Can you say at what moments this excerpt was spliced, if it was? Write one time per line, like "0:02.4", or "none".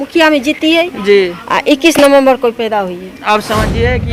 none